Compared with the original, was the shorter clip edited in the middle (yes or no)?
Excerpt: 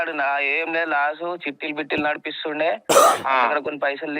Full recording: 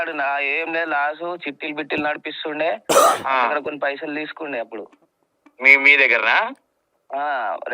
no